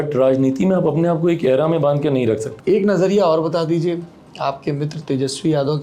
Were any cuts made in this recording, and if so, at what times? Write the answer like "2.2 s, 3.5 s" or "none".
2.5 s